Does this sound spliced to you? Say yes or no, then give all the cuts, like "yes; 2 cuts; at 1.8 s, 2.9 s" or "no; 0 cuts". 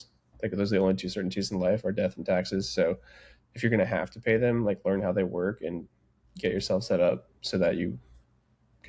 no; 0 cuts